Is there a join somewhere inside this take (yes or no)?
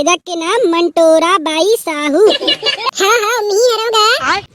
no